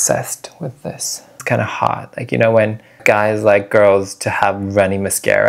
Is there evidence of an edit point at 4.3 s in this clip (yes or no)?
no